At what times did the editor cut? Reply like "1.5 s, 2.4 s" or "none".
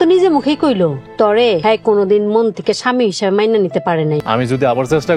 1.5 s, 4.2 s